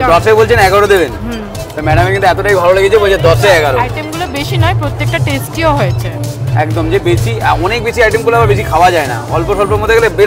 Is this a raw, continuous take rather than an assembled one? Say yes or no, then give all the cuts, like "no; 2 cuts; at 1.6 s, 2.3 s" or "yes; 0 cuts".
yes; 0 cuts